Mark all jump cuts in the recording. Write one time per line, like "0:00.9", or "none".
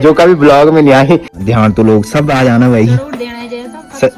0:01.4